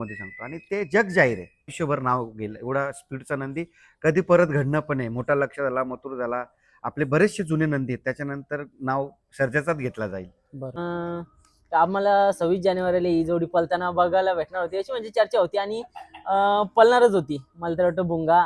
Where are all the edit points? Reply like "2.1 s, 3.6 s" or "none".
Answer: 1.7 s, 10.8 s